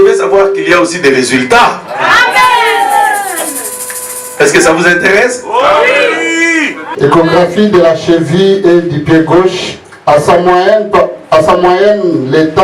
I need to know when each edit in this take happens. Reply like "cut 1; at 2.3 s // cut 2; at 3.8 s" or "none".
cut 1; at 6.8 s